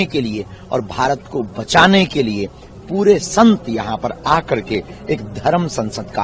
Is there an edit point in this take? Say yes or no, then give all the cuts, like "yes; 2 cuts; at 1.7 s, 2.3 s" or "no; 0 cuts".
no; 0 cuts